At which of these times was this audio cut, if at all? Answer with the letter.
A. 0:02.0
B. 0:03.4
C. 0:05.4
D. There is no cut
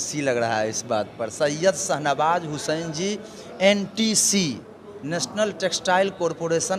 D